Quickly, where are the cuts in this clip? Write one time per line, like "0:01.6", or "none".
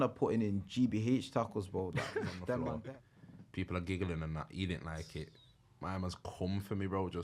0:02.8

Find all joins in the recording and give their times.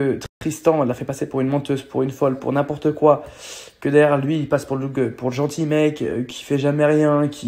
none

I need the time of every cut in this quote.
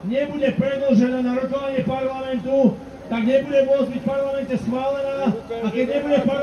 none

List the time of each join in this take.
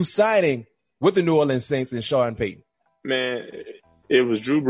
none

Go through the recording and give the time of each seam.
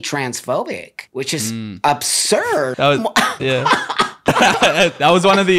0:00.9
0:02.7
0:04.3

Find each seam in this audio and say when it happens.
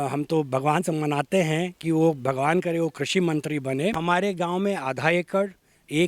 0:04.0

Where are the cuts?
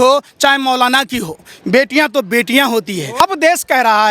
0:03.2

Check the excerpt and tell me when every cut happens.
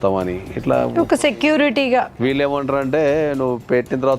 0:02.1

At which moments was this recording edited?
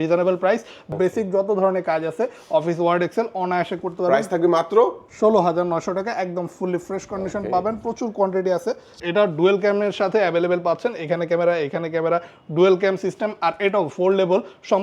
0:00.8
0:09.0

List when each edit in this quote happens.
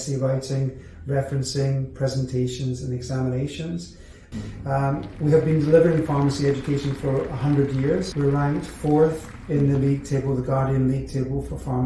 0:04.2
0:08.1

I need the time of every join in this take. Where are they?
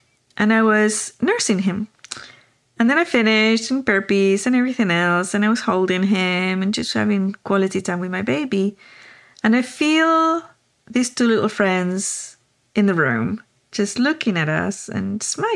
none

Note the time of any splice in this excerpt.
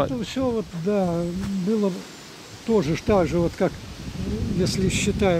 none

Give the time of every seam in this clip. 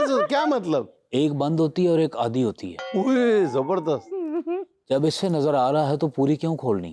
none

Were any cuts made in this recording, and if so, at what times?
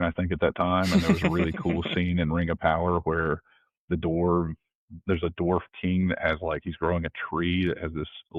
none

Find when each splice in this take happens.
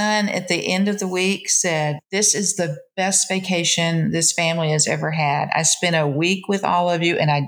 none

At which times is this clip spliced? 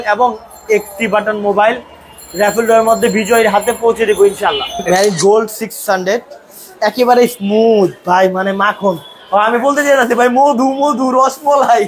0:04.8

